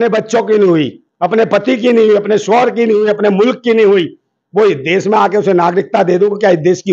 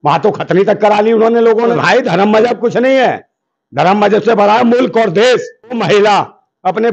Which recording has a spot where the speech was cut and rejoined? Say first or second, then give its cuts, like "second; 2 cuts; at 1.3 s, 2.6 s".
second; 2 cuts; at 1.7 s, 5.8 s